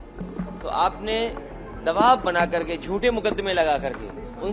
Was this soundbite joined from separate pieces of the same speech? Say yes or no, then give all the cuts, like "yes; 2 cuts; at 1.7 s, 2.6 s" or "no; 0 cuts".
no; 0 cuts